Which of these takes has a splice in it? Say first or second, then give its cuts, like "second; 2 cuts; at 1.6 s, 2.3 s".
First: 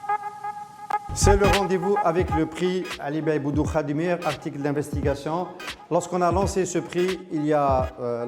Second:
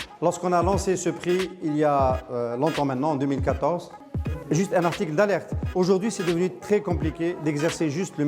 first; 1 cut; at 1.0 s